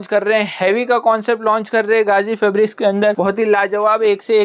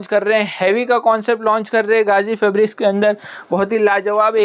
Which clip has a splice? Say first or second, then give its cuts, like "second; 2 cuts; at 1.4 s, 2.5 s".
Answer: first; 1 cut; at 3.2 s